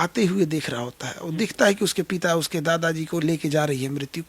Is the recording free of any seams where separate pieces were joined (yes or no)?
yes